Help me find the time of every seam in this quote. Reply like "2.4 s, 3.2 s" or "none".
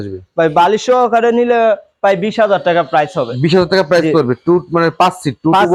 none